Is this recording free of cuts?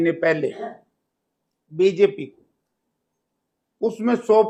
yes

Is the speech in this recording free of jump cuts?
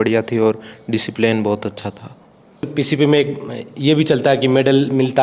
no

